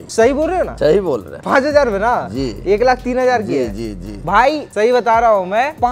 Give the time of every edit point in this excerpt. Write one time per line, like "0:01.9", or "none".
none